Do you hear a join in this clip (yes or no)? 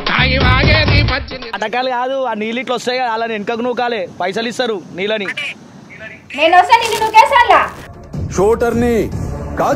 yes